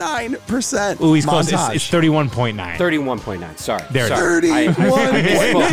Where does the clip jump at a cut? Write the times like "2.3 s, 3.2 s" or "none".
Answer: none

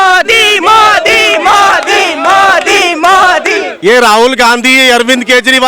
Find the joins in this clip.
3.7 s

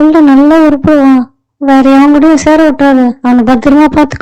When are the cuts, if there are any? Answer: none

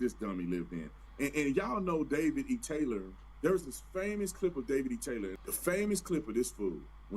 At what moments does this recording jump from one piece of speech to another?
1.9 s

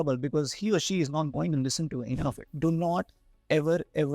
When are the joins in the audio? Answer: 2.4 s

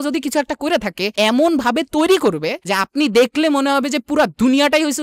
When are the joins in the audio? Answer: 1.1 s

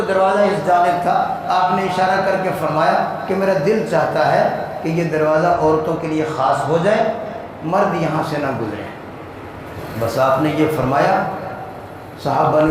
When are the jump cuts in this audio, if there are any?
9.7 s

